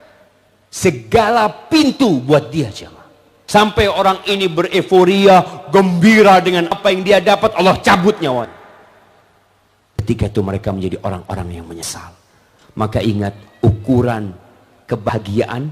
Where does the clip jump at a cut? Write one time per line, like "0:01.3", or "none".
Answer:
none

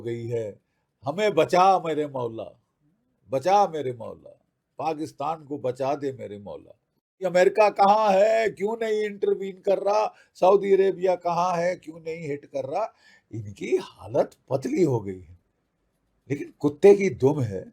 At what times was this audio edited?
0:07.1

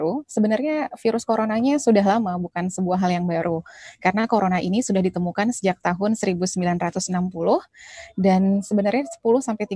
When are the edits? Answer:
none

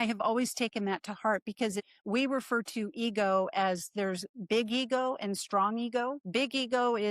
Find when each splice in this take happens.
0:01.9
0:06.2

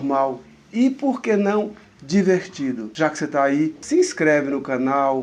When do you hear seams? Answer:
none

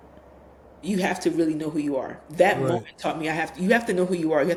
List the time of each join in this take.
none

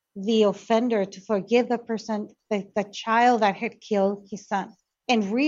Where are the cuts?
none

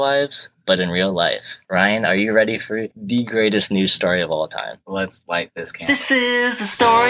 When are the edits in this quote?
0:05.7

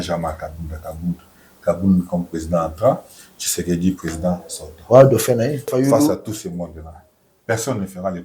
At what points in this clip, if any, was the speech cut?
0:05.7

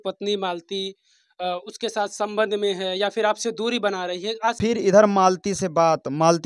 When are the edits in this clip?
0:04.6

